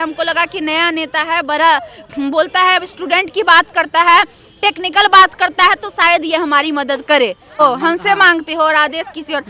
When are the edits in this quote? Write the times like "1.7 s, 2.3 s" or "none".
7.6 s